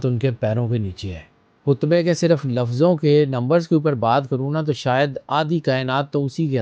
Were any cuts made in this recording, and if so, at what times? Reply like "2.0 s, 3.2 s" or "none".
1.6 s

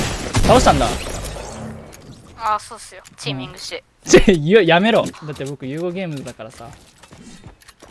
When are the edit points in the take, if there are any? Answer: 1.3 s, 3.9 s, 5.1 s

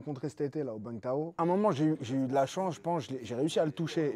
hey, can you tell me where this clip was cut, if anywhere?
1.3 s

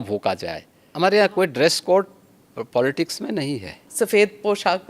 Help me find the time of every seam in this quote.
0.9 s, 3.9 s

